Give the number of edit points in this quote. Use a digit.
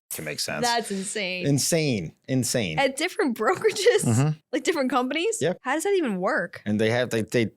2